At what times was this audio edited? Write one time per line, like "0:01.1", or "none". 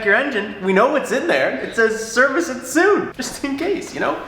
0:03.2

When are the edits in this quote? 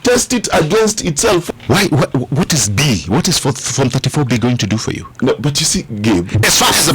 0:01.4

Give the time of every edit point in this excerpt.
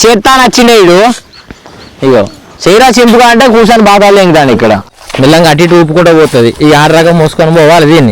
0:05.0

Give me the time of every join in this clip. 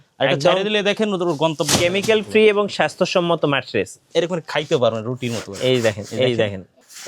0:04.0

